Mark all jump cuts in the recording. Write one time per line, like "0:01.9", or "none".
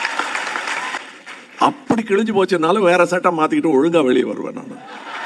0:01.0